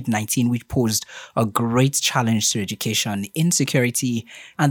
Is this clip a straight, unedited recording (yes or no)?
yes